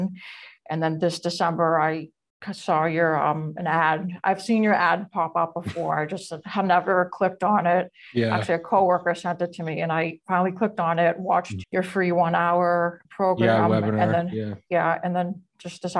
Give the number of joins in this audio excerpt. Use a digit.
2